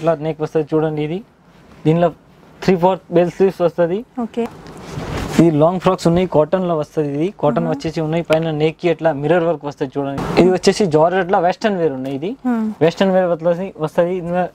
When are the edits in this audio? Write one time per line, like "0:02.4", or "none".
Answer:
0:04.5
0:10.2